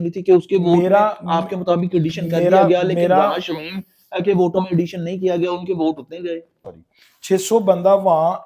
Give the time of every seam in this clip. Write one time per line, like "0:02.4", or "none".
0:06.5